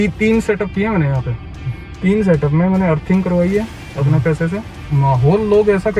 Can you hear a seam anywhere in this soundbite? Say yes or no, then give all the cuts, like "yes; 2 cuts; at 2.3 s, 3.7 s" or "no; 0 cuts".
yes; 1 cut; at 4.8 s